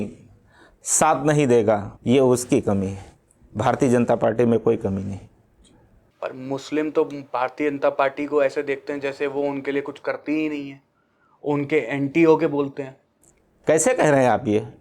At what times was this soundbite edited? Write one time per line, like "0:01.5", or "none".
0:01.9